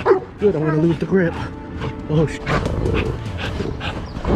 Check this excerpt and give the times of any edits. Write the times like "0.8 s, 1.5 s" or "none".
2.4 s